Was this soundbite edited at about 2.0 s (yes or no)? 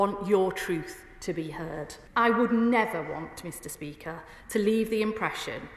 yes